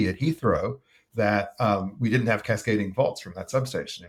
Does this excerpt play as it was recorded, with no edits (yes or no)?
yes